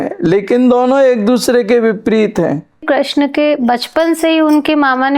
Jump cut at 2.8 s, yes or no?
yes